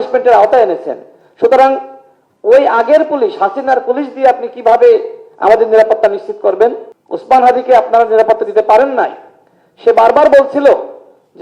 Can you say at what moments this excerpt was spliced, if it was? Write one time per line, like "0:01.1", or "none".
0:06.9